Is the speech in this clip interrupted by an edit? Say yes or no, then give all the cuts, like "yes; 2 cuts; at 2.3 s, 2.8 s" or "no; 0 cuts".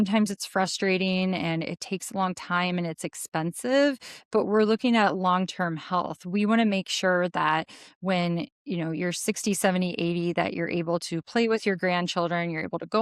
no; 0 cuts